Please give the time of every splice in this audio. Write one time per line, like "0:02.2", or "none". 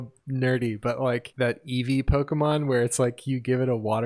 0:01.3